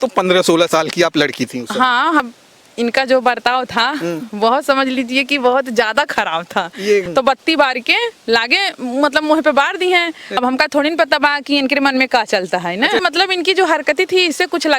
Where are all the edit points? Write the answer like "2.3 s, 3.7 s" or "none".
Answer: 2.3 s, 7.1 s, 10.2 s, 13.0 s